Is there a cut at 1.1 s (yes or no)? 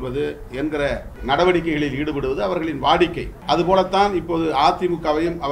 yes